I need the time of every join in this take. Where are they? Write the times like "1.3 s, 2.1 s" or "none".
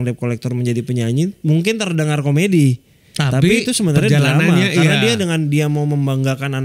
none